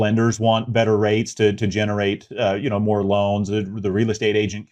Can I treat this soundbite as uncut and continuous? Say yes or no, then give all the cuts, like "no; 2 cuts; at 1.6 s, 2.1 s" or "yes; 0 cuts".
yes; 0 cuts